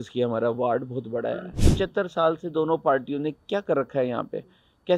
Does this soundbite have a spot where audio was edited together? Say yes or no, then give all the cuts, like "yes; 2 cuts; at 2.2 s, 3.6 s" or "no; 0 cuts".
yes; 1 cut; at 1.5 s